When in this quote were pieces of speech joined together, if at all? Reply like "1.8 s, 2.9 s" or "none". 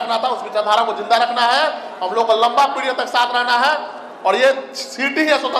none